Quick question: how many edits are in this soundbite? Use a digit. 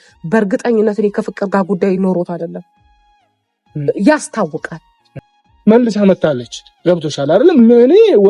1